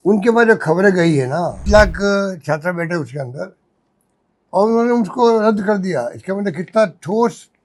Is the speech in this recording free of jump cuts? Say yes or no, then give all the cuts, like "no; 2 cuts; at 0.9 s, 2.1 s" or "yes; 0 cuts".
no; 1 cut; at 1.6 s